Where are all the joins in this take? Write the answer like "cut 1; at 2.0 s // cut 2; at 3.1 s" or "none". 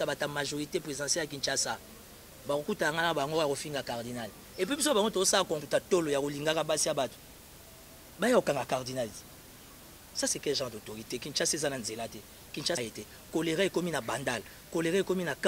cut 1; at 5.6 s // cut 2; at 12.8 s